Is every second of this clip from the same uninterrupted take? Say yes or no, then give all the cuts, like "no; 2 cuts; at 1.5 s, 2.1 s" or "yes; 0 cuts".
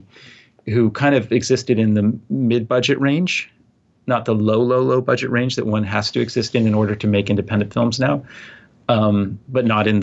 yes; 0 cuts